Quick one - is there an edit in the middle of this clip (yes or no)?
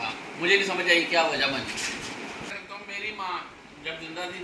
yes